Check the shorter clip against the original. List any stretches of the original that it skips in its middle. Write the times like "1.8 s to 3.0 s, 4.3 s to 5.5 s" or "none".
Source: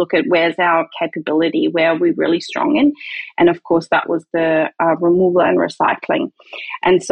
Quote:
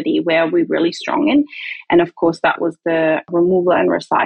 4.8 s to 5.0 s